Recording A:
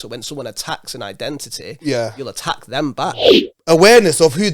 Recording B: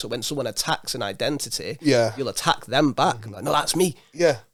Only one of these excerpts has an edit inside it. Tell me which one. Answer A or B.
A